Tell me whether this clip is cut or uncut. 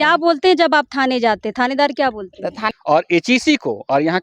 cut